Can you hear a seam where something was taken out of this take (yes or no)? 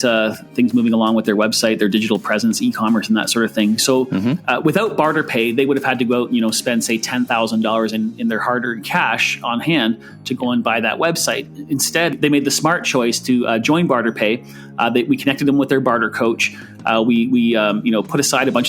yes